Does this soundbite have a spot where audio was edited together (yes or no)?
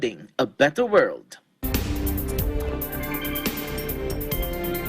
yes